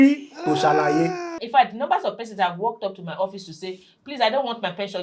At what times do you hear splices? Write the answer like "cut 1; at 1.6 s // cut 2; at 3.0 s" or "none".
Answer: cut 1; at 1.4 s